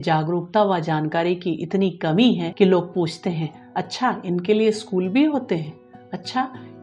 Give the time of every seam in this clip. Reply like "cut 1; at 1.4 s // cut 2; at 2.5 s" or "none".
cut 1; at 2.5 s